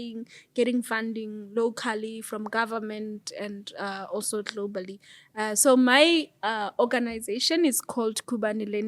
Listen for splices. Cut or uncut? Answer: uncut